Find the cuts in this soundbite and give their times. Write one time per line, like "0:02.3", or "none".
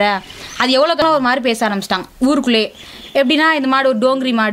0:01.0